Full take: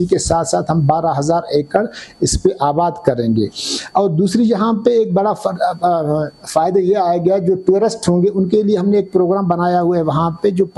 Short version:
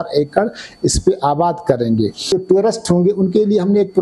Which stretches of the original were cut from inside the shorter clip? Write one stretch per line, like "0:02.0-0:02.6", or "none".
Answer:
0:03.7-0:07.5